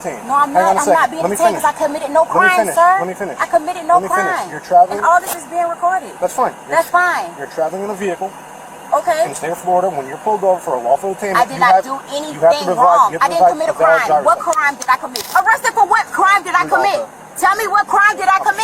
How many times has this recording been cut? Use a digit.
1